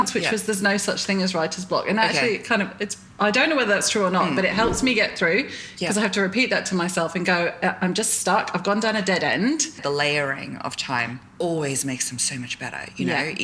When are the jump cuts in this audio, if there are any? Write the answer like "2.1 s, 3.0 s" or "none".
9.8 s